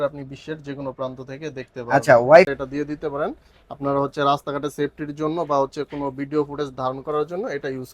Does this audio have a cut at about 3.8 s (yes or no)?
no